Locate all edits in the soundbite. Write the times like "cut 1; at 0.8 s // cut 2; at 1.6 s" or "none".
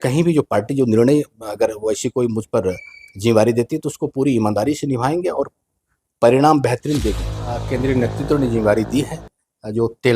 cut 1; at 7.7 s